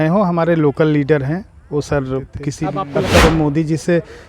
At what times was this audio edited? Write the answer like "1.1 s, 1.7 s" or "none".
2.7 s